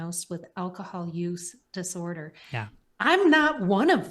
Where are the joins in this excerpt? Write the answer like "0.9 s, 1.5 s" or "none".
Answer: 2.8 s